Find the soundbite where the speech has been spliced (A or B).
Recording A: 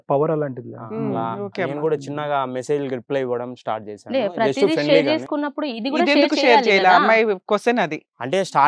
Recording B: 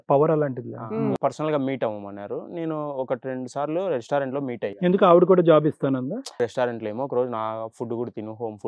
B